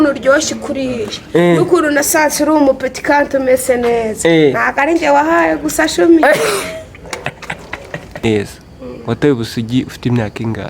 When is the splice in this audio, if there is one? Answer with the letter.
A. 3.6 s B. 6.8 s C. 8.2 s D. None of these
C